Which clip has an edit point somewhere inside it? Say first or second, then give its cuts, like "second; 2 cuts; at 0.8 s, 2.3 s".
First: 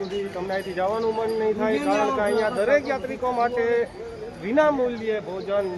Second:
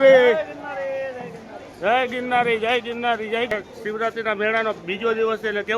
second; 1 cut; at 3.5 s